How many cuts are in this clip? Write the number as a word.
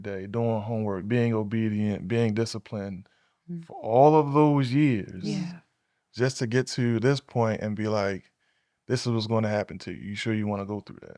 zero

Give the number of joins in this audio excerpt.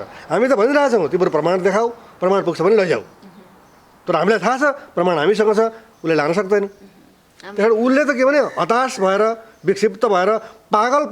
zero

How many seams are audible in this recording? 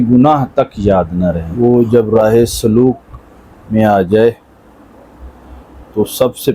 one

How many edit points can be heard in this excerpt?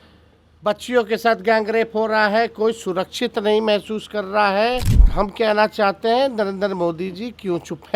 one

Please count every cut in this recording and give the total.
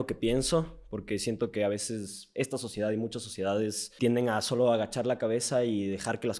one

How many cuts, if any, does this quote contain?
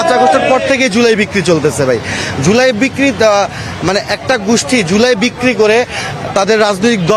zero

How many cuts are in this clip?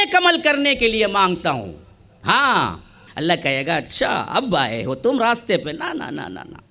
one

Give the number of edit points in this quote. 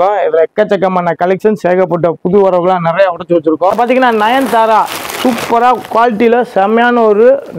one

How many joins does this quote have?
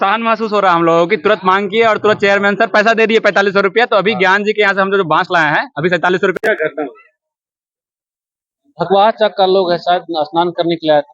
one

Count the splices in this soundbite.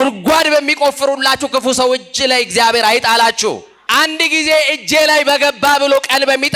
one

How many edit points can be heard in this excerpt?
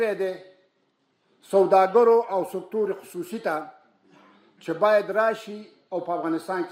zero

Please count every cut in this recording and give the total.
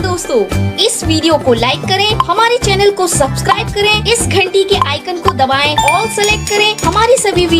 zero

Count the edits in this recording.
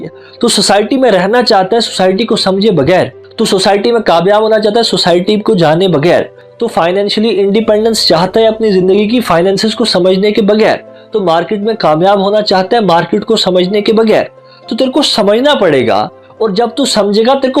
one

